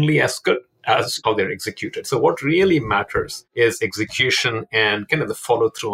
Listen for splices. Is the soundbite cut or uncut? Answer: cut